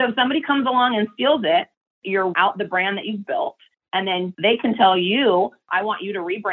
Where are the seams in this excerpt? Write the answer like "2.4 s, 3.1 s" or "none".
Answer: 2.0 s, 4.4 s, 5.6 s